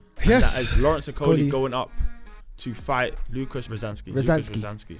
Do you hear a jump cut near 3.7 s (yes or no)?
yes